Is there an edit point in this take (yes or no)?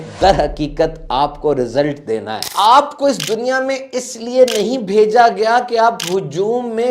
yes